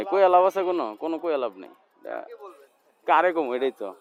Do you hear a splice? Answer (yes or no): no